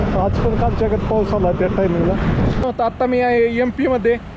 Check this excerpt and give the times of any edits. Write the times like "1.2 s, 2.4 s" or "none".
2.6 s